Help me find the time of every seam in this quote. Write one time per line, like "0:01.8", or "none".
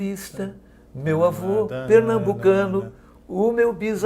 none